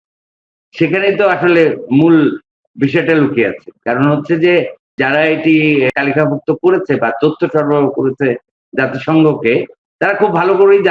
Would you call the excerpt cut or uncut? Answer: cut